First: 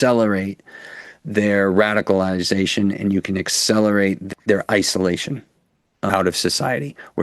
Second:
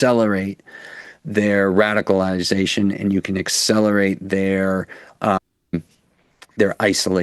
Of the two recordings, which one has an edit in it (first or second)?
first